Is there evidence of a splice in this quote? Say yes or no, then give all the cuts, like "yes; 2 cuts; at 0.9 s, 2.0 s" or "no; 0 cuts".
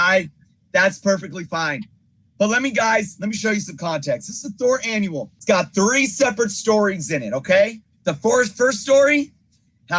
yes; 2 cuts; at 5.3 s, 7.9 s